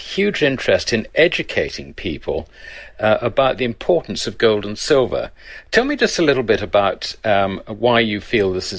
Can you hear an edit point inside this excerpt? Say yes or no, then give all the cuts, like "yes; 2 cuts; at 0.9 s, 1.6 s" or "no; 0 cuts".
yes; 1 cut; at 3.6 s